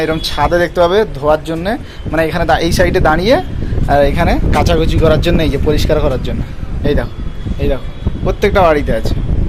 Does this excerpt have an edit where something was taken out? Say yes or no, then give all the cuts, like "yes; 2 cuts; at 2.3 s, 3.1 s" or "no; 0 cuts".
no; 0 cuts